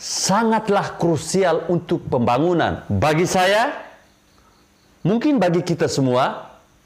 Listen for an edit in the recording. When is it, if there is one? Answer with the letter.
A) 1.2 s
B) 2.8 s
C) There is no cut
B